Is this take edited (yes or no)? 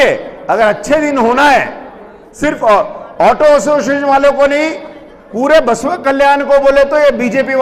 no